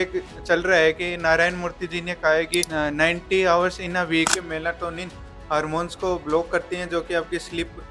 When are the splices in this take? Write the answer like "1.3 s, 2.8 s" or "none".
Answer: 2.7 s, 4.3 s